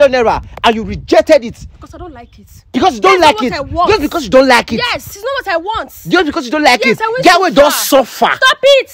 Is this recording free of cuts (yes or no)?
yes